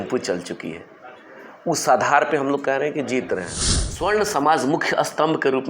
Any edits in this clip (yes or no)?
yes